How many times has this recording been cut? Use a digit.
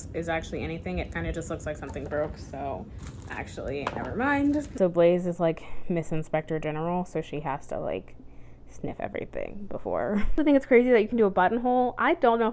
2